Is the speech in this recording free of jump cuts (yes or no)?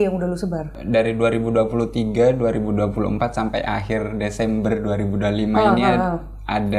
yes